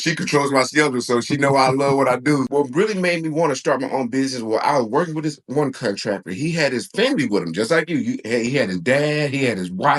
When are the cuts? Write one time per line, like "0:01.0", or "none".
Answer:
0:02.5

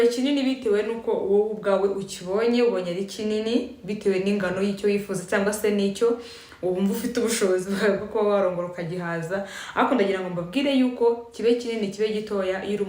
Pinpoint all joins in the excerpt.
none

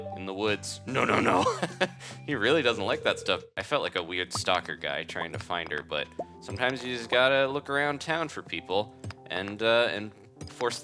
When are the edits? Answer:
0:03.6

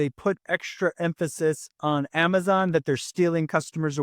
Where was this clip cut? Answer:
none

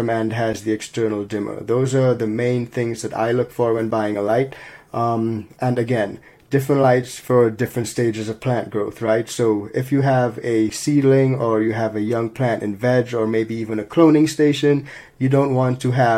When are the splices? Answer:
none

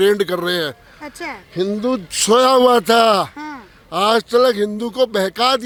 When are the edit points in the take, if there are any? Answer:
none

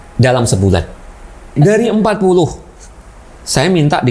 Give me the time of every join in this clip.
0:01.5

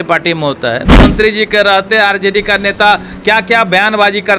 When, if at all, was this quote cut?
0:00.9

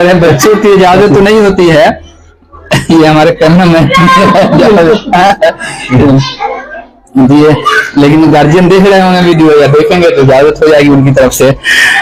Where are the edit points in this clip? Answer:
none

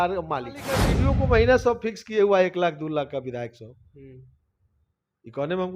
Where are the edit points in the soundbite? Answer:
0:00.9

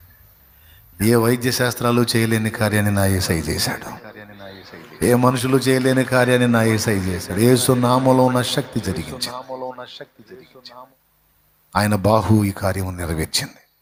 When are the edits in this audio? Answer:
none

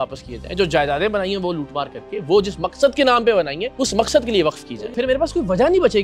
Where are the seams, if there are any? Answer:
0:03.6
0:04.7

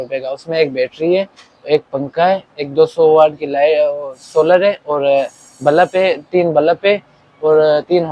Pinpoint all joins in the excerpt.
none

